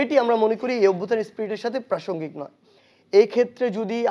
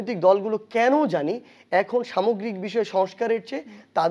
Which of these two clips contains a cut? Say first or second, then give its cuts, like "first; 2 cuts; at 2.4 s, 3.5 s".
first; 1 cut; at 2.6 s